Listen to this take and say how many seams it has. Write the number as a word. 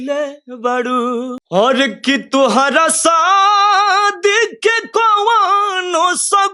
one